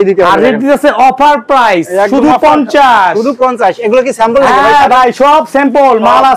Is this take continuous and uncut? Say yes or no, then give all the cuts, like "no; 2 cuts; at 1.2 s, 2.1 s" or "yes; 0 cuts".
yes; 0 cuts